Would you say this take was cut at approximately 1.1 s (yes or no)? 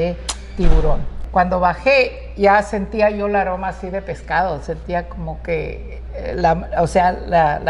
yes